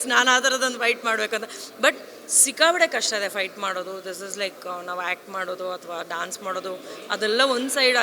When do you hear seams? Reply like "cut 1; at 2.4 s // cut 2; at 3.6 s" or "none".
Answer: none